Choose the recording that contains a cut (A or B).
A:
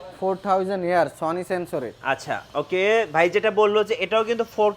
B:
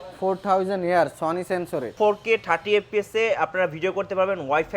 B